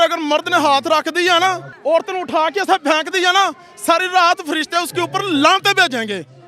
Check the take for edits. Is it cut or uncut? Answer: cut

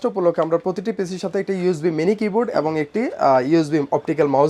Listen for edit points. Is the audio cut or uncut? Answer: uncut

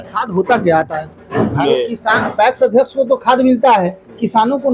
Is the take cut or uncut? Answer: cut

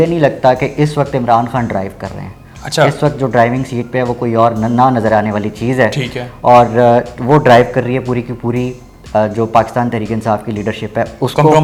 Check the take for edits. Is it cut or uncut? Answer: uncut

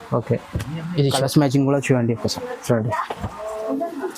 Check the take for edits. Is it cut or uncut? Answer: cut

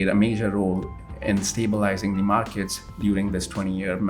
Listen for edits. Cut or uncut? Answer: cut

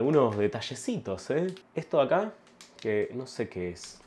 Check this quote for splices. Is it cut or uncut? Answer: uncut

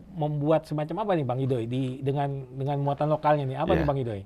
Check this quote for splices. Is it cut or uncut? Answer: uncut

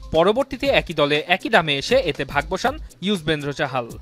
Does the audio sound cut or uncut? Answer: uncut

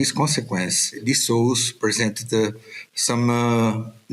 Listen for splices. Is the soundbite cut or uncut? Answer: cut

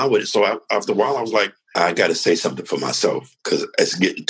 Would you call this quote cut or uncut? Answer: cut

